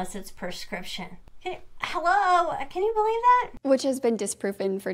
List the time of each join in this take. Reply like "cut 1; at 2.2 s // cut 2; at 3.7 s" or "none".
cut 1; at 1.2 s // cut 2; at 3.5 s